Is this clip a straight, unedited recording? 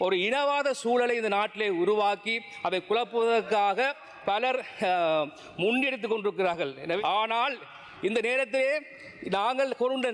no; 1 cut; at 7.0 s

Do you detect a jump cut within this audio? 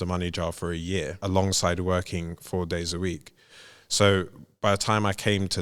yes; 1 cut; at 1.2 s

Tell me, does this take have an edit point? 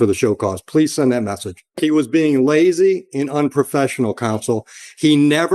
yes; 1 cut; at 1.8 s

